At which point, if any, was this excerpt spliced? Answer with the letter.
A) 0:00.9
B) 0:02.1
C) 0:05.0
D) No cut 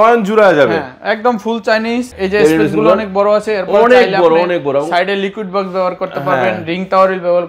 B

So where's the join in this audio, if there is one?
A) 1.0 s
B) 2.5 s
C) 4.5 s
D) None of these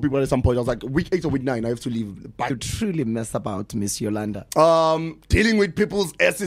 B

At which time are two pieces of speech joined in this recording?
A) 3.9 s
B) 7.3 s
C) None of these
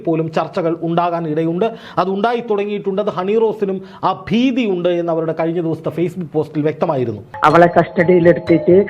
B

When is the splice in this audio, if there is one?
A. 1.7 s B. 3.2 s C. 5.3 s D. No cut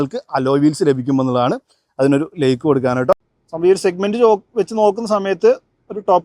B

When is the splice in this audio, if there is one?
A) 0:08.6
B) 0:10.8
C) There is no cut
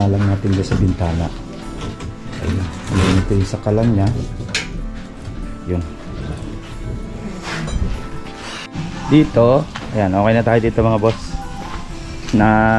A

